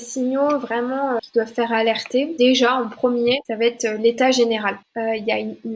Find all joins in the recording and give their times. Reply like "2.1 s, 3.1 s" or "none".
1.2 s, 2.3 s, 3.5 s, 4.8 s